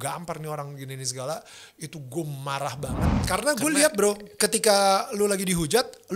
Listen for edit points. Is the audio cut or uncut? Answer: cut